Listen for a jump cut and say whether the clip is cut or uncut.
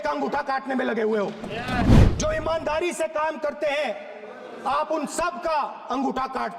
cut